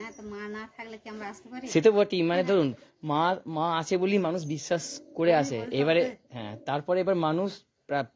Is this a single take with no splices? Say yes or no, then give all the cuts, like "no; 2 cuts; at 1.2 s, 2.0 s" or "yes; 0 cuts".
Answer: yes; 0 cuts